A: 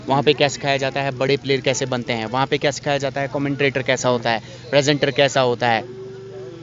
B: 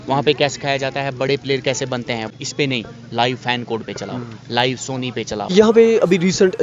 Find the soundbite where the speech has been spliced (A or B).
B